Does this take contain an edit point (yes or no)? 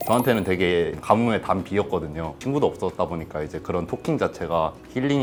no